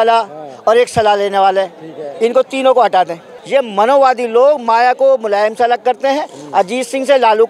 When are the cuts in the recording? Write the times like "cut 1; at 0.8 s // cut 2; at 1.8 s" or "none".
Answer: cut 1; at 3.3 s